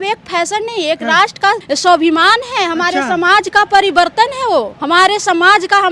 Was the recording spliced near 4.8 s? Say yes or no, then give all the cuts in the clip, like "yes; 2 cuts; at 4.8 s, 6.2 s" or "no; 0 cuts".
yes; 2 cuts; at 1.6 s, 4.8 s